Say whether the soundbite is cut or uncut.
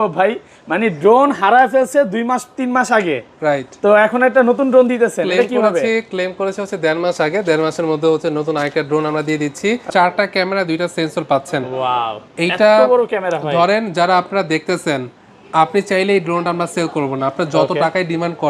cut